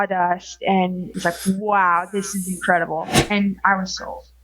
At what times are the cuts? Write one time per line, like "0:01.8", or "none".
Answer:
0:01.1
0:03.1